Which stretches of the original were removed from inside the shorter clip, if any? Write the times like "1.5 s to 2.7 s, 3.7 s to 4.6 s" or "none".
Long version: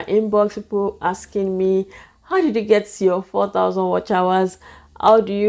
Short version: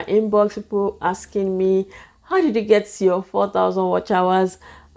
none